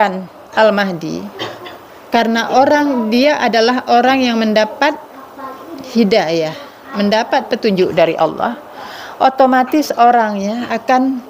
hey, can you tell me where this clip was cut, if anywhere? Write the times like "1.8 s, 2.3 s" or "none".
none